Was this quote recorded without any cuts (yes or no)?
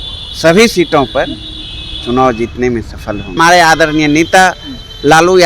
no